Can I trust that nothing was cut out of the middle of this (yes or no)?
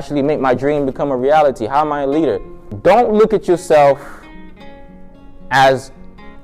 no